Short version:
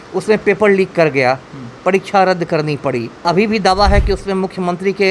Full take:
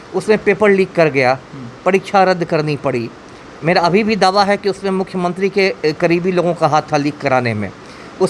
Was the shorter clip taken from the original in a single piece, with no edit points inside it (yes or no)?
no